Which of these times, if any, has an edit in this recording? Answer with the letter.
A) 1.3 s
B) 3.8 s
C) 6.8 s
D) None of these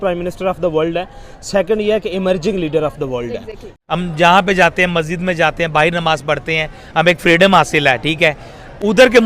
B